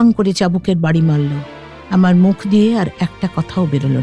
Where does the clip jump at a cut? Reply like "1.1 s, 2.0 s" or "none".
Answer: 1.4 s